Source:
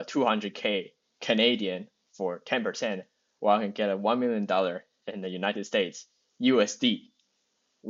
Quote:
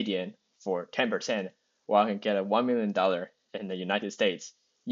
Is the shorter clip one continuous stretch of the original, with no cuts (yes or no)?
yes